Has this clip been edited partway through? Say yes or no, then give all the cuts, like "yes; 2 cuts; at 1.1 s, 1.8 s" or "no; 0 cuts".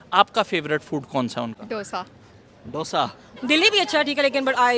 yes; 1 cut; at 3.3 s